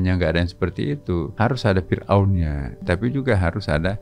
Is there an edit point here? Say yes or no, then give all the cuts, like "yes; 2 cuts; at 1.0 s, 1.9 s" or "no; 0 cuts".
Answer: yes; 2 cuts; at 1.3 s, 2.7 s